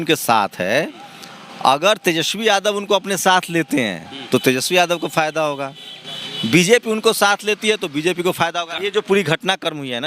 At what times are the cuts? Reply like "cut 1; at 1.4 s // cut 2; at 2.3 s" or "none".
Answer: cut 1; at 8.8 s